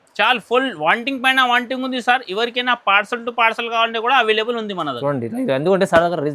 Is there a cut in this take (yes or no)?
no